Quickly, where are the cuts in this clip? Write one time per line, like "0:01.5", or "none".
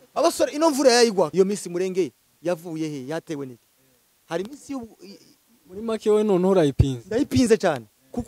0:01.3